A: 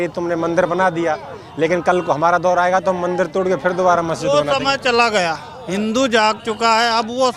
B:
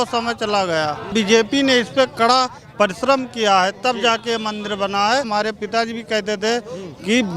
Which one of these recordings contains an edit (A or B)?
B